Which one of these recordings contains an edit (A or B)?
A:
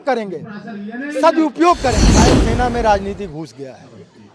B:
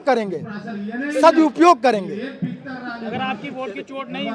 A